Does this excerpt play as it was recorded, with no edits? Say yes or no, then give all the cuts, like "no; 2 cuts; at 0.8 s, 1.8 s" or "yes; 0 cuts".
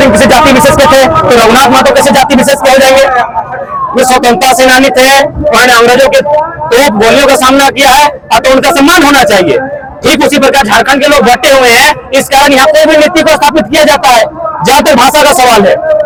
yes; 0 cuts